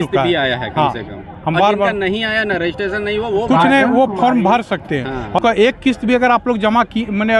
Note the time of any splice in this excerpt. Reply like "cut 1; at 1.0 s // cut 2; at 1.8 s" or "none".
cut 1; at 5.4 s

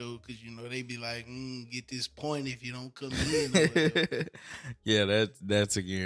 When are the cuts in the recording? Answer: cut 1; at 3.3 s

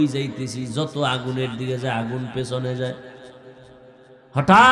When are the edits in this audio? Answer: none

